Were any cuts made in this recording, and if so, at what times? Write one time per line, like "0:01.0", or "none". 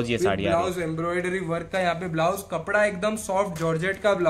none